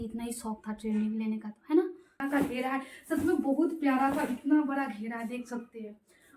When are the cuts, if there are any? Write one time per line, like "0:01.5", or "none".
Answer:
0:02.2